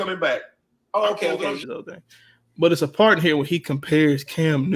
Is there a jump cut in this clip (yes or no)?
yes